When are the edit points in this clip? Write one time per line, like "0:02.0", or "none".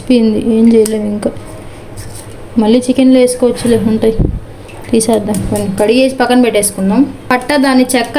0:07.2